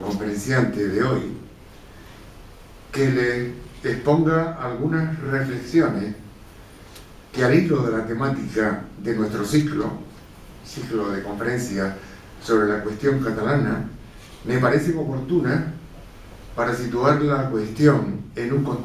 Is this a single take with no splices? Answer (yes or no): no